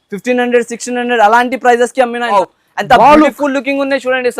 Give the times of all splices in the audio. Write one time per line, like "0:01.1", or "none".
0:02.3